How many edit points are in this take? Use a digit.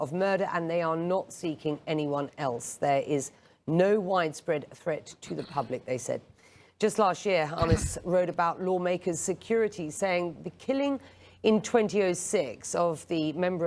1